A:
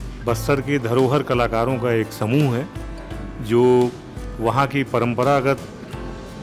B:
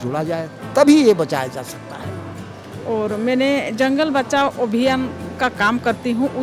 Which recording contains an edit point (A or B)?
B